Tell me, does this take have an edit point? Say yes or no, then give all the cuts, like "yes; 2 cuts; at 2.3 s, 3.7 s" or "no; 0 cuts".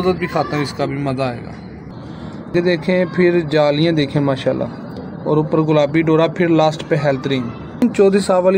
yes; 2 cuts; at 2.5 s, 7.8 s